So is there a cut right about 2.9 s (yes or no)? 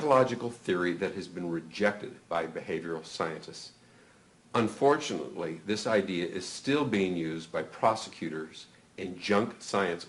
no